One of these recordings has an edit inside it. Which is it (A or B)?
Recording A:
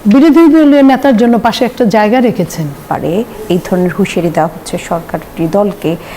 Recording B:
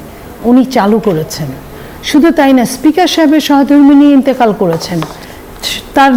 A